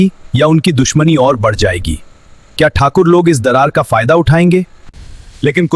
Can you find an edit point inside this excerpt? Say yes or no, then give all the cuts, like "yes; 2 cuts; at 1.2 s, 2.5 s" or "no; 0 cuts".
yes; 1 cut; at 4.8 s